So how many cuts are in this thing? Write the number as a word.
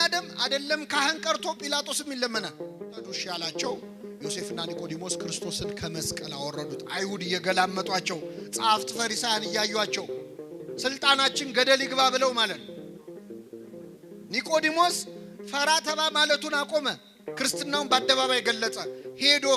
one